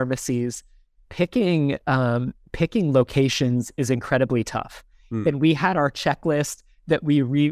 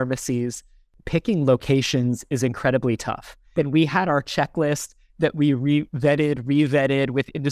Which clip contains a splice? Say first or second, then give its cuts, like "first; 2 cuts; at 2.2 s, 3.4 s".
second; 2 cuts; at 0.9 s, 3.3 s